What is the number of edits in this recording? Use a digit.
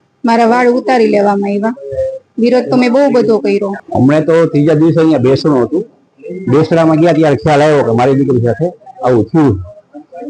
1